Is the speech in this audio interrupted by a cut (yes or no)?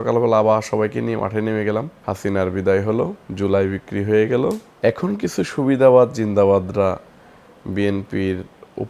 yes